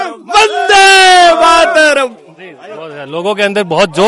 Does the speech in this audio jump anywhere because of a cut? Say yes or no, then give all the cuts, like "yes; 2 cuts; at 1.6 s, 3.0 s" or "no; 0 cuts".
no; 0 cuts